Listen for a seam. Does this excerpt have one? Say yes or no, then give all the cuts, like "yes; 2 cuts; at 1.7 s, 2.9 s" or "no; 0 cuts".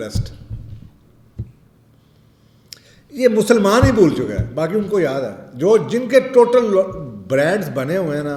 no; 0 cuts